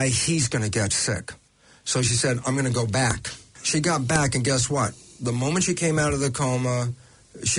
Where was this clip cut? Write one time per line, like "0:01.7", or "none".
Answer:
0:03.5